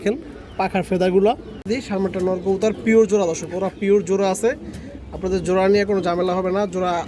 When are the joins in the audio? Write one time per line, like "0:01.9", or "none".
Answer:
0:01.9